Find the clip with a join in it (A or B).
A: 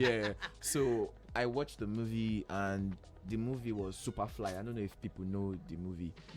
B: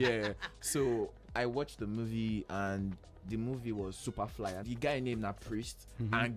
B